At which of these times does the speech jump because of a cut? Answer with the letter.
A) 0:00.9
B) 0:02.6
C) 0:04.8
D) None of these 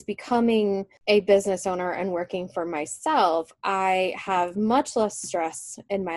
A